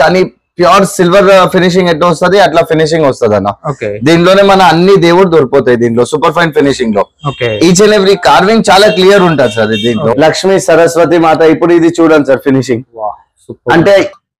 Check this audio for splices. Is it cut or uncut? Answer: cut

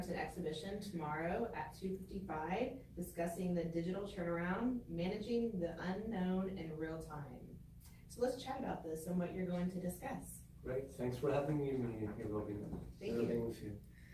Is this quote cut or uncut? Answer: uncut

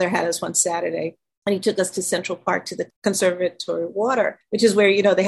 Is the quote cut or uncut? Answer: cut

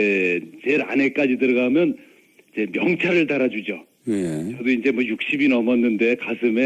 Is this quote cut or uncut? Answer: cut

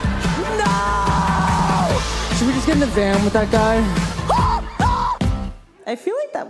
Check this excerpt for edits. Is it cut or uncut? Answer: uncut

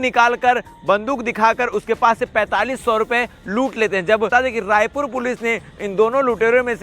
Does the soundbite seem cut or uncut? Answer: cut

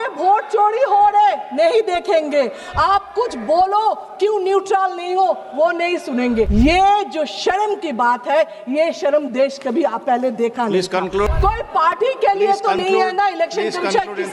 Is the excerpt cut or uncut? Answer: cut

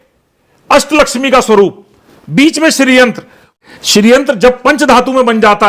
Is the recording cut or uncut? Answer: cut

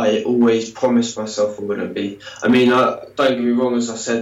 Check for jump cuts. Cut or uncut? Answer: uncut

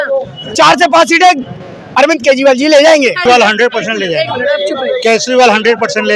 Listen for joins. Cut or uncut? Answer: cut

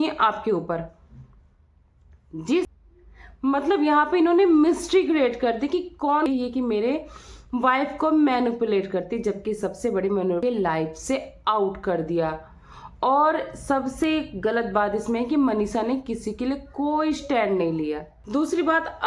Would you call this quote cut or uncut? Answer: cut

